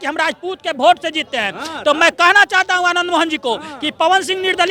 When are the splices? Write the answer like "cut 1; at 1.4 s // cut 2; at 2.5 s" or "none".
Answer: none